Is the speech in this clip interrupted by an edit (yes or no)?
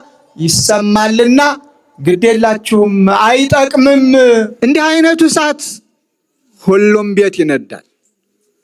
yes